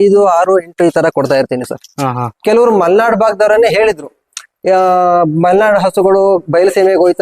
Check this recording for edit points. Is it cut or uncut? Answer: cut